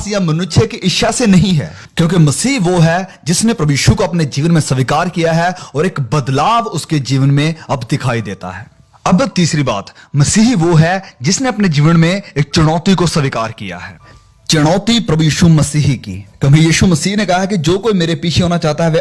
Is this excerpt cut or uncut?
cut